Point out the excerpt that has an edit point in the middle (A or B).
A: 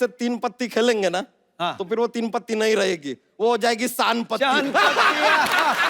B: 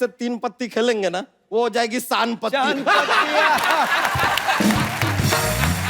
B